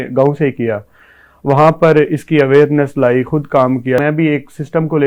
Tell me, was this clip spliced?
yes; 1 cut; at 4.0 s

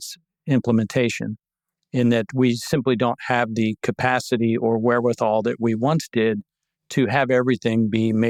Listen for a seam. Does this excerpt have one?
no; 0 cuts

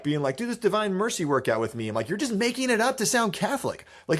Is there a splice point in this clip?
no; 0 cuts

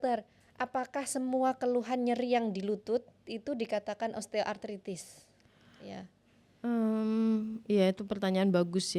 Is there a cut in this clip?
no; 0 cuts

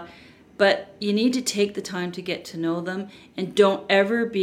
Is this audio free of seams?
yes; 0 cuts

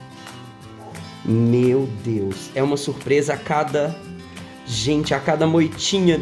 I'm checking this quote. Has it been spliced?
no; 0 cuts

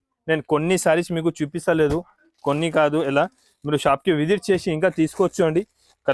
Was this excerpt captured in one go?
yes; 0 cuts

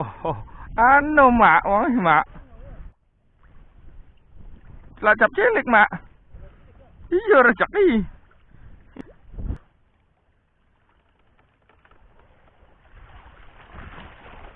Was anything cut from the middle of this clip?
yes; 1 cut; at 9.6 s

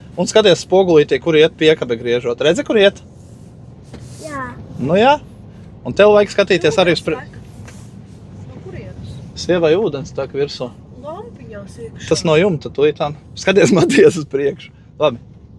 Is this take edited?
no; 0 cuts

